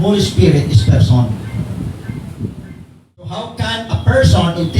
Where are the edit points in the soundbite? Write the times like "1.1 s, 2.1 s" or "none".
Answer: 3.4 s